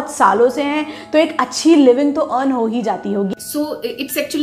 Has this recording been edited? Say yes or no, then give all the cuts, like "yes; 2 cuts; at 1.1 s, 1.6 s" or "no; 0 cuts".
yes; 1 cut; at 3.4 s